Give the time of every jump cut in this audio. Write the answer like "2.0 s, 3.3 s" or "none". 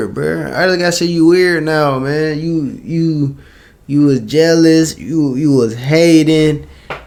none